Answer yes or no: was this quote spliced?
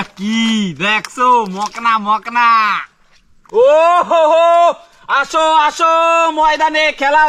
yes